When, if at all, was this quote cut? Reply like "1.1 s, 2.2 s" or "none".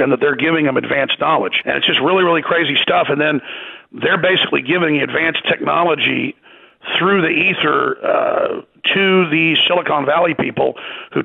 1.6 s